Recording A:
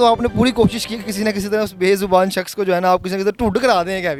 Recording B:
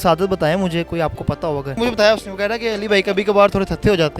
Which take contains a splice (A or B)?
B